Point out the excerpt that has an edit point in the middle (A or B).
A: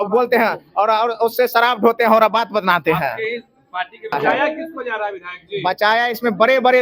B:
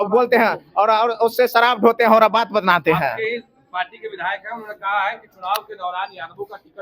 A